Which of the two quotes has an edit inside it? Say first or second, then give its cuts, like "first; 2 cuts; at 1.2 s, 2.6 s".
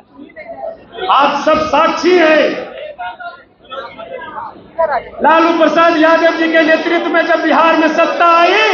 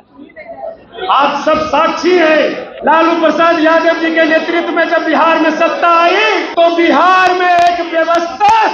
second; 2 cuts; at 2.7 s, 6.5 s